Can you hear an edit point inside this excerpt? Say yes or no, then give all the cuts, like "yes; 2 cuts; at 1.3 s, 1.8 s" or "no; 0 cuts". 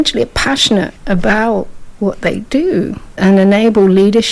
yes; 1 cut; at 1.0 s